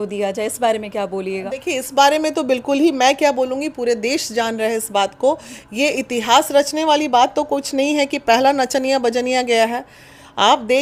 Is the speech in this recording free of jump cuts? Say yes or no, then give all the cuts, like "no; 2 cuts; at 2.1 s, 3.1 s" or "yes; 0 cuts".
yes; 0 cuts